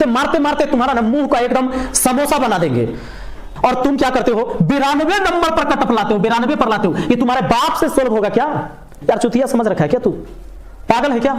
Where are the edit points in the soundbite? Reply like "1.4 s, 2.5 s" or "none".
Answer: 3.5 s, 8.9 s

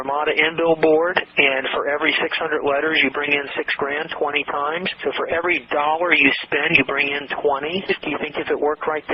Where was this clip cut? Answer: 7.9 s

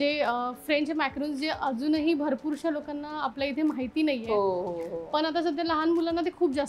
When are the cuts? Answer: none

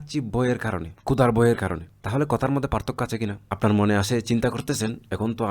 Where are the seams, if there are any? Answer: 0.9 s, 1.9 s, 3.4 s

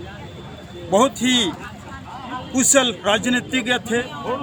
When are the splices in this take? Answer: none

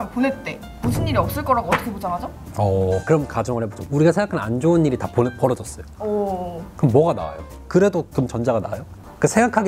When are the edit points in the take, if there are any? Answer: none

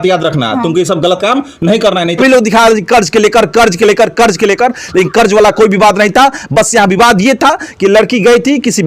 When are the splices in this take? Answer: 2.2 s

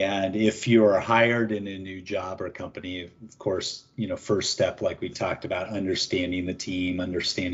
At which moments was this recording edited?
none

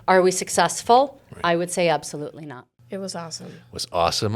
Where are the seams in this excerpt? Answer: 2.6 s

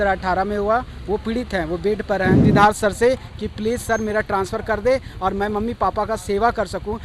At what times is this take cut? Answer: 2.4 s

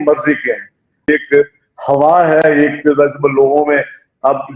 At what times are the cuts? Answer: 0.9 s

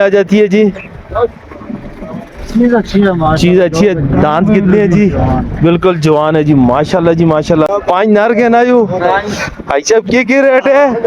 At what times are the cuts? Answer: 7.7 s

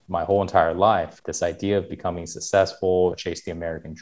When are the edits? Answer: 1.1 s, 3.2 s

